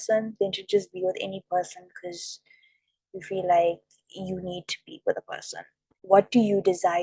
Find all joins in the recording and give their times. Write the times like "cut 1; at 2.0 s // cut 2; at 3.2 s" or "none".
cut 1; at 6.0 s